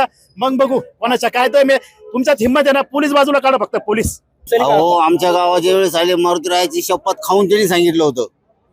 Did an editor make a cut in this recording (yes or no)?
yes